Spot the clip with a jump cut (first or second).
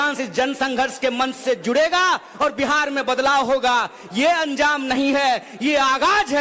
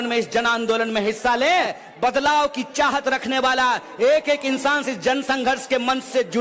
second